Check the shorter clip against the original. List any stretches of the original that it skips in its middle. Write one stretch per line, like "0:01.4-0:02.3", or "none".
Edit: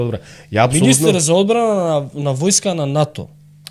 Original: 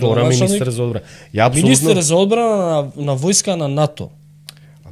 none